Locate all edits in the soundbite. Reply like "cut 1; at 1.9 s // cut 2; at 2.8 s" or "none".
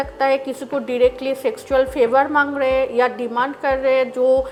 none